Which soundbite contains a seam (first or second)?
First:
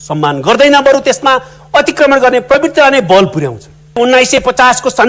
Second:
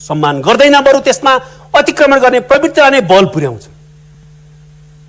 first